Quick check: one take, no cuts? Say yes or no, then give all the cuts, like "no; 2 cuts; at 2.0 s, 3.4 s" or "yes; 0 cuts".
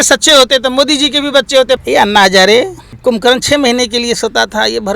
no; 2 cuts; at 1.8 s, 2.8 s